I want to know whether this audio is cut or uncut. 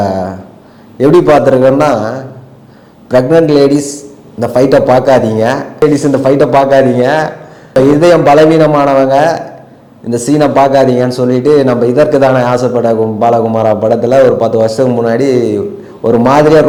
uncut